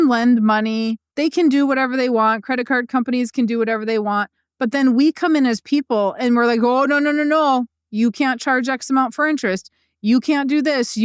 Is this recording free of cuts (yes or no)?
no